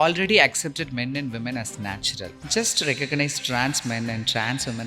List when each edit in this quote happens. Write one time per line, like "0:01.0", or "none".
0:02.4